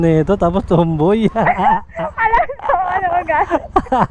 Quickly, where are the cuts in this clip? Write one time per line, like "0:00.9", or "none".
none

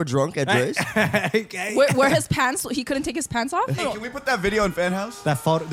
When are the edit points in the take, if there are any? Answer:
0:03.8

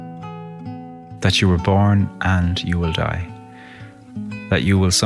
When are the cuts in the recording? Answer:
0:01.2

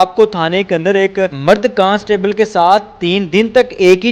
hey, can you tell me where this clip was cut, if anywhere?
0:01.4

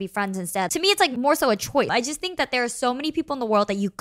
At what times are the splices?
0:01.0
0:01.9

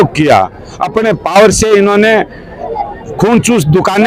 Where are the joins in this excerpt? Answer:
none

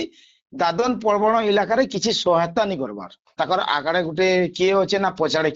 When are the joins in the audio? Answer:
0:03.3

